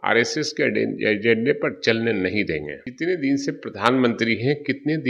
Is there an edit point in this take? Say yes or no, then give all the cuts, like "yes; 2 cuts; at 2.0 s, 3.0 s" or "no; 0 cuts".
yes; 1 cut; at 2.8 s